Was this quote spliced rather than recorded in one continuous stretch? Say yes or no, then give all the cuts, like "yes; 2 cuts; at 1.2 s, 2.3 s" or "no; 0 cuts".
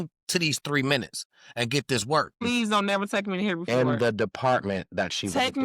yes; 1 cut; at 2.4 s